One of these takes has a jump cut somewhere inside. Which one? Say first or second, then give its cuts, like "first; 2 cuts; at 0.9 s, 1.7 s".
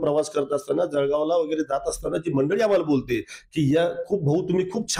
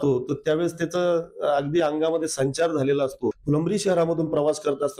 second; 1 cut; at 3.4 s